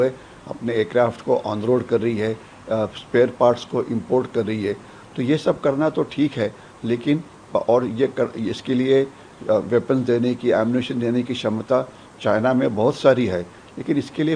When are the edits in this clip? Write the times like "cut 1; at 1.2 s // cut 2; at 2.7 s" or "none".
none